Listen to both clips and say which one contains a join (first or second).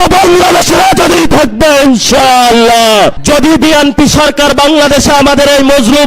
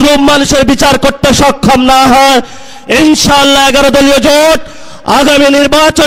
first